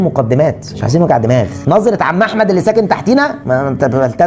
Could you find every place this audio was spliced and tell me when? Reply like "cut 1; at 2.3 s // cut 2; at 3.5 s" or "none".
cut 1; at 1.6 s